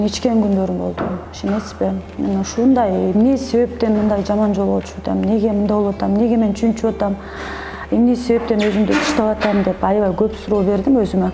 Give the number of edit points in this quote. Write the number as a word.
zero